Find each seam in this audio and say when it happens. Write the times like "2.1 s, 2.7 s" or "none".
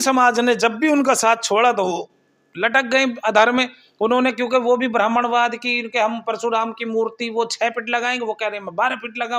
none